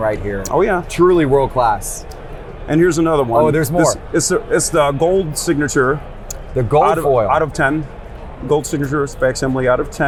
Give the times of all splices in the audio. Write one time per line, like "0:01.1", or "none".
none